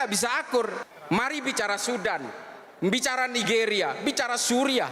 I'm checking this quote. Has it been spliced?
yes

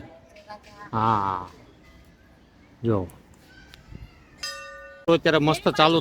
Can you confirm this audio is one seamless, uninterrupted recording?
no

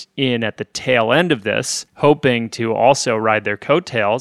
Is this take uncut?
yes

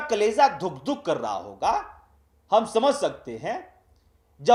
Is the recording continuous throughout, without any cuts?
yes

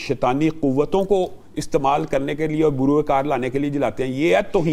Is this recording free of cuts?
yes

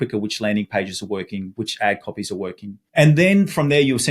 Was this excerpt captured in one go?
no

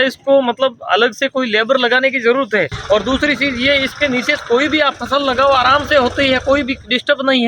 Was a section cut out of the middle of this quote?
yes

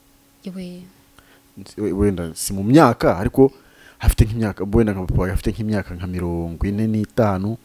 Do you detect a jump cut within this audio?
no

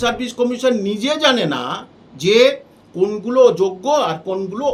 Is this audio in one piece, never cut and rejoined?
yes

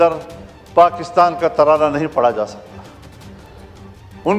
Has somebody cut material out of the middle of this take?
no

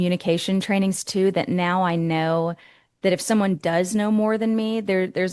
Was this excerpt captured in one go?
yes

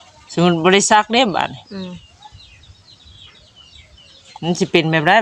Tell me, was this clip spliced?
no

